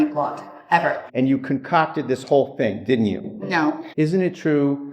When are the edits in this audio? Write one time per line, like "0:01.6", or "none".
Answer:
0:01.0
0:03.9